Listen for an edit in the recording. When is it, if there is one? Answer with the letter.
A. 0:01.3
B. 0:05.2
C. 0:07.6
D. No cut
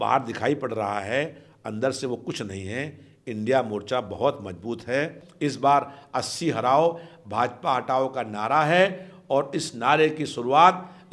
B